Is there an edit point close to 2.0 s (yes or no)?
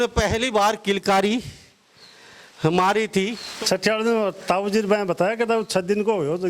no